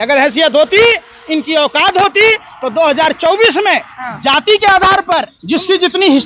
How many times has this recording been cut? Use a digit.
1